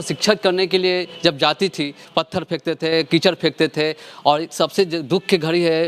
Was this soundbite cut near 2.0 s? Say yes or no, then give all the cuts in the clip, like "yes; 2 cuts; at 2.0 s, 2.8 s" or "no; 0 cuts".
yes; 1 cut; at 2.0 s